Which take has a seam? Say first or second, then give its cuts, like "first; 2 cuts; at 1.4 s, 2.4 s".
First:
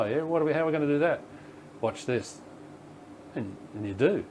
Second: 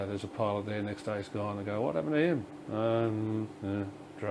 first; 1 cut; at 2.8 s